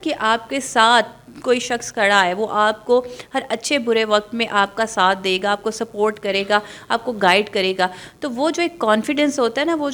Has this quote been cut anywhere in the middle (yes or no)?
no